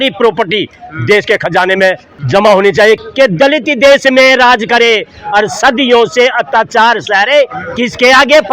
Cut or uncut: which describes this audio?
cut